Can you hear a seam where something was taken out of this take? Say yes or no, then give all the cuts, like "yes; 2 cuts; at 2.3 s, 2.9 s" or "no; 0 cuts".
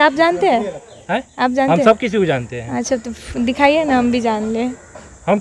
no; 0 cuts